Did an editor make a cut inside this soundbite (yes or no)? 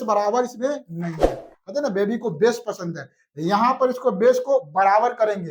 no